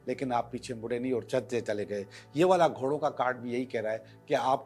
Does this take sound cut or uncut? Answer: uncut